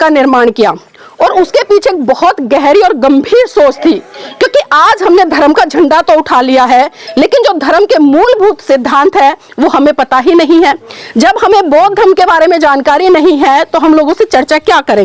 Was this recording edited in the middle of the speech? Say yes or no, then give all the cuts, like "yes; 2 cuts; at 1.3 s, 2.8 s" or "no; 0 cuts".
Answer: no; 0 cuts